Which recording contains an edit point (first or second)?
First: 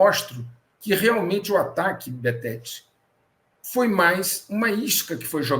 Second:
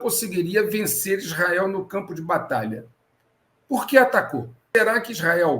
second